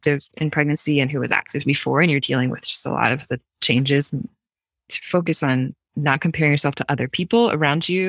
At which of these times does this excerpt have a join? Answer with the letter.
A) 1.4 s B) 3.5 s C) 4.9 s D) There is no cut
C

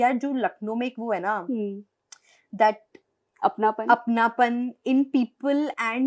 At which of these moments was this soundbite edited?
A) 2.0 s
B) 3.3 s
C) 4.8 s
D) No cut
D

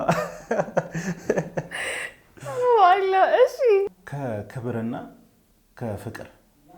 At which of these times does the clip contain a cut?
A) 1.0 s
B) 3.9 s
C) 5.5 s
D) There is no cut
B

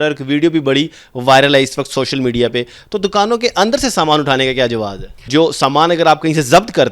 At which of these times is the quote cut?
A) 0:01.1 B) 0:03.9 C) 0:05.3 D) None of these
C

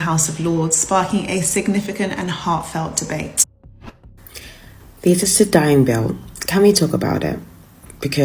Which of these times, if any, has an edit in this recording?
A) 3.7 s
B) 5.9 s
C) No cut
A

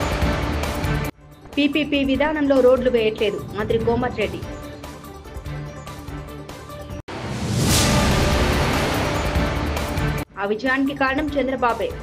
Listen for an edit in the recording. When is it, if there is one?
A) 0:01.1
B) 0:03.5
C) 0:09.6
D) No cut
D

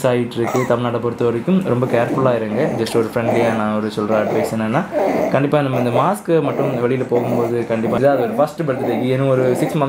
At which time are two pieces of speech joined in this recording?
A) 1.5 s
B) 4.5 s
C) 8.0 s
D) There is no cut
C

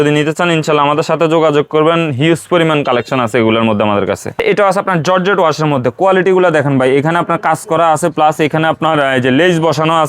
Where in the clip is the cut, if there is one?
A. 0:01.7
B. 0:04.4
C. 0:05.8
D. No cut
B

